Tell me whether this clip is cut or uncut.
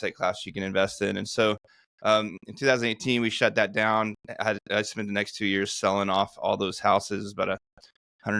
uncut